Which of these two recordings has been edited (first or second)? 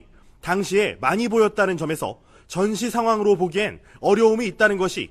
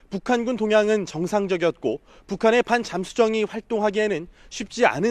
first